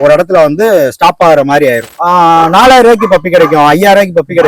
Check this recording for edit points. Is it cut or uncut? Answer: cut